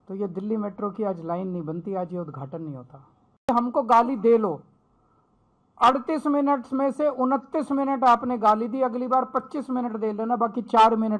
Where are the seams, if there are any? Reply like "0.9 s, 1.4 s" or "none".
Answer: 3.4 s